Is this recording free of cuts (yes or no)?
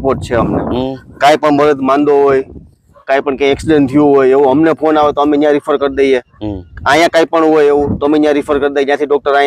yes